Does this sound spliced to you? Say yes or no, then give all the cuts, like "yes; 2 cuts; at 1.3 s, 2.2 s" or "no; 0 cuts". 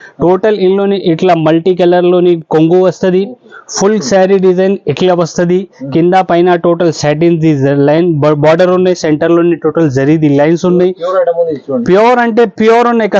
no; 0 cuts